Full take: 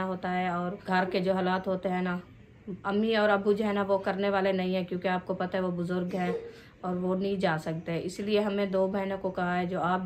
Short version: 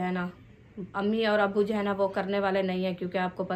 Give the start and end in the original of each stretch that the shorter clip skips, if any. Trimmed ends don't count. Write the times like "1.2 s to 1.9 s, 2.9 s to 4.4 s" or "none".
none